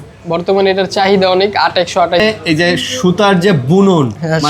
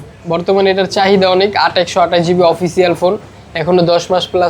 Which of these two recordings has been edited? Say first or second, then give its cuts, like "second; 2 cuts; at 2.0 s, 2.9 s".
first; 1 cut; at 2.2 s